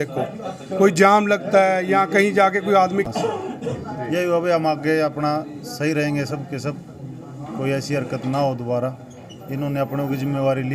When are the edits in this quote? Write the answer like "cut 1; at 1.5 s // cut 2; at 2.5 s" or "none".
cut 1; at 3.1 s